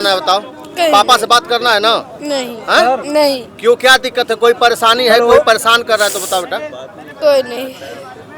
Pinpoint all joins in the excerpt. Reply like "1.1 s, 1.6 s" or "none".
none